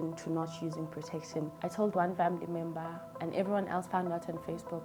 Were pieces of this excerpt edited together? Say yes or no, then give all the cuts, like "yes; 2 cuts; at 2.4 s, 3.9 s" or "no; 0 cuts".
yes; 1 cut; at 1.6 s